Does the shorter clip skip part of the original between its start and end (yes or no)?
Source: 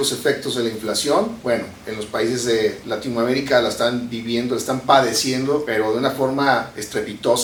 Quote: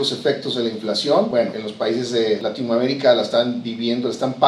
yes